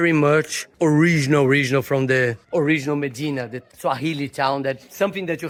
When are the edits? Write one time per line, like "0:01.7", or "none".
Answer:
none